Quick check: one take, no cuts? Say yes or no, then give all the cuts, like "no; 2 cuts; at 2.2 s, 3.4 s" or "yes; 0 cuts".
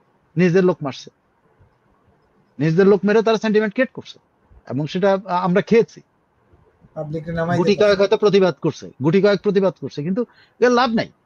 yes; 0 cuts